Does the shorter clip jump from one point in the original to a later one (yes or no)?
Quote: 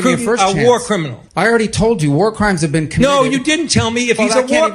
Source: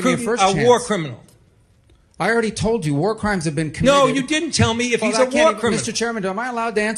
yes